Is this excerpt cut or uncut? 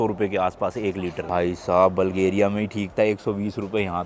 uncut